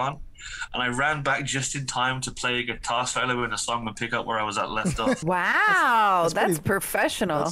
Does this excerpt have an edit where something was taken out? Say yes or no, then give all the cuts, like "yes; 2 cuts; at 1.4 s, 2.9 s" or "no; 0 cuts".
yes; 1 cut; at 5.2 s